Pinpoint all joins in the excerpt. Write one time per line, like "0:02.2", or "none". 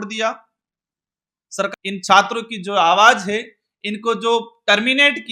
0:01.7

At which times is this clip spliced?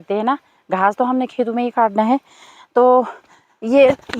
none

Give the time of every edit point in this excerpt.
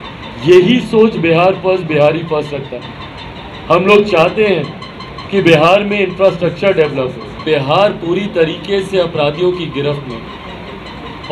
0:07.4

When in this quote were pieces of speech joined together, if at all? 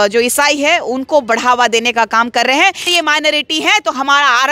0:02.9

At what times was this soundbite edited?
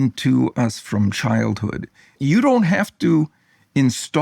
0:02.1

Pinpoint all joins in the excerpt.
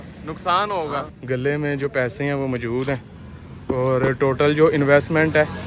0:01.1

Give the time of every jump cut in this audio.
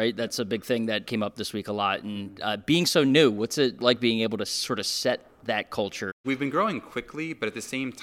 0:01.1
0:03.8
0:06.1

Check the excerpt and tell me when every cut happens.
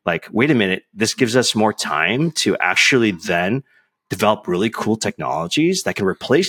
none

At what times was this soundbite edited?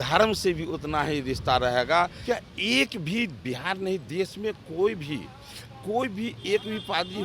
0:02.2

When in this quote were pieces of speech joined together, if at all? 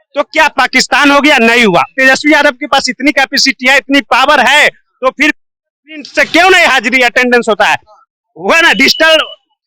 0:01.9

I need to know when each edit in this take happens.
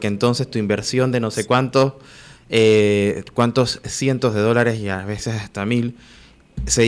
none

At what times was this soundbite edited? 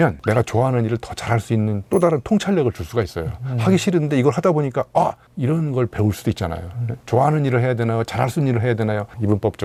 none

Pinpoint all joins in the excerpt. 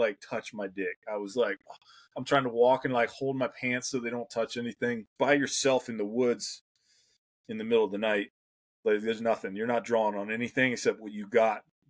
0:05.1

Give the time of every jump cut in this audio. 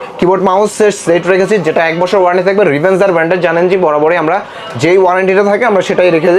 none

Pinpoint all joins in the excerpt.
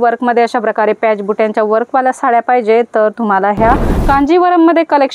0:03.9

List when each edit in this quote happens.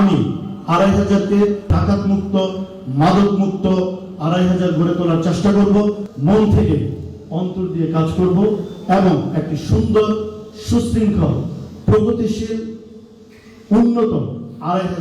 0:01.7
0:06.1

